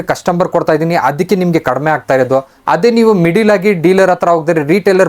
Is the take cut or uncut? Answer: uncut